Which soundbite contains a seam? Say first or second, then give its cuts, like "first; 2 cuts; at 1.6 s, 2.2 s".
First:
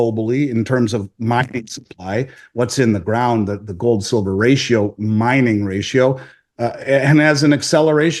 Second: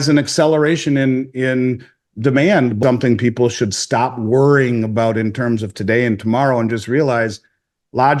second; 1 cut; at 2.8 s